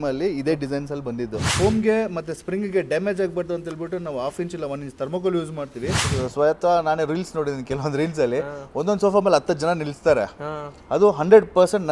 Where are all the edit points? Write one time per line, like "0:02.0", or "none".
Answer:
0:01.5
0:06.0

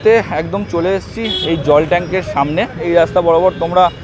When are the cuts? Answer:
0:02.8

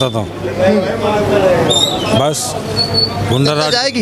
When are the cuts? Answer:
none

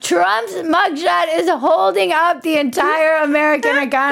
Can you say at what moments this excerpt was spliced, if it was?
none

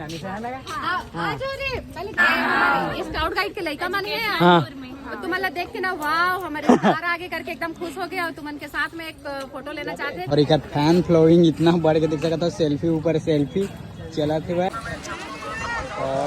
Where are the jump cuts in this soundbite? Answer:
0:02.2
0:10.3
0:14.7

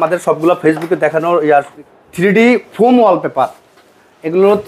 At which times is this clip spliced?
0:01.8

